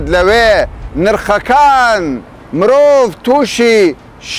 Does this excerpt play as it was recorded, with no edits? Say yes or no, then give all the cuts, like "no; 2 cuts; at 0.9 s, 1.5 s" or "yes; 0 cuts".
yes; 0 cuts